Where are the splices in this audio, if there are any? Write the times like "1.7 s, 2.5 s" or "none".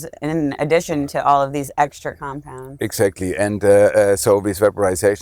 none